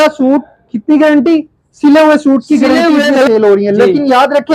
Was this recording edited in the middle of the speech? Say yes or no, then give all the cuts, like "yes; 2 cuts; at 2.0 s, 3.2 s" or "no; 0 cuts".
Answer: yes; 1 cut; at 3.3 s